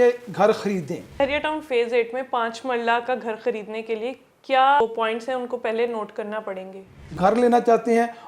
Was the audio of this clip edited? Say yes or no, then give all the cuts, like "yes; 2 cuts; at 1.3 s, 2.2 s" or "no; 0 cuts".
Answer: yes; 3 cuts; at 1.2 s, 4.8 s, 7.2 s